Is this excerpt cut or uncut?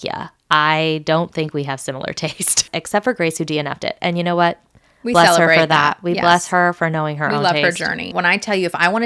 cut